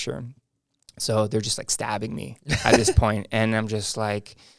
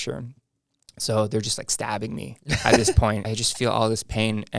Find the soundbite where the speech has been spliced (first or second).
second